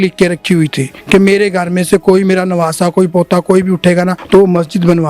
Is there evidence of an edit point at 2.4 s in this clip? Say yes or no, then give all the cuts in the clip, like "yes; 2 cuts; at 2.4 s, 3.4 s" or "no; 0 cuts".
no; 2 cuts; at 0.9 s, 4.2 s